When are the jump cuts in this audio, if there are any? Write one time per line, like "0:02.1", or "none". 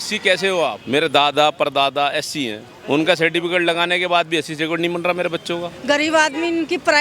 0:00.8
0:02.7
0:05.7